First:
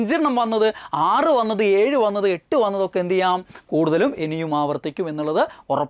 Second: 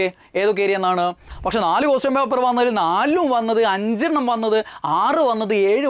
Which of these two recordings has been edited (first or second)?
second